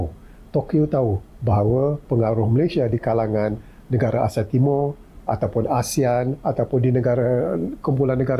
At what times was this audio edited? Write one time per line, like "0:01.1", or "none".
none